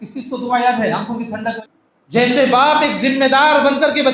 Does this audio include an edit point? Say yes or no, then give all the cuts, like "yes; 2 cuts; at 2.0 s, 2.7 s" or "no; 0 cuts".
yes; 1 cut; at 1.6 s